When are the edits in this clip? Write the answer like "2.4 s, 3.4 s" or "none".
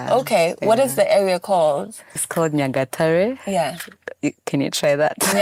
none